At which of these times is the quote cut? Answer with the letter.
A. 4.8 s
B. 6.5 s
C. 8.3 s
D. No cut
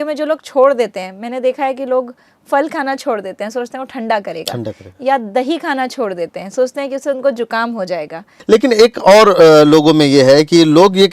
C